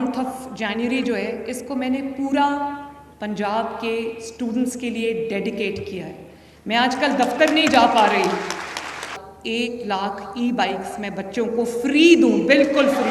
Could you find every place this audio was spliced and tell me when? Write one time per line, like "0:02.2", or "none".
0:09.2